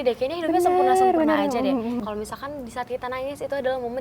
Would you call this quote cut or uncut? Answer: cut